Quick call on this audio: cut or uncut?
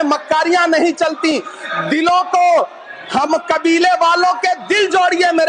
uncut